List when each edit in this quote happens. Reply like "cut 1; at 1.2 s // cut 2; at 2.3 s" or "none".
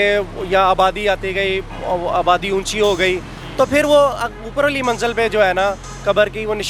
none